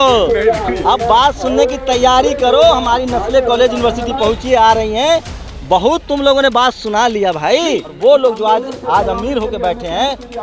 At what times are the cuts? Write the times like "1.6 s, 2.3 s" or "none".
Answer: 7.9 s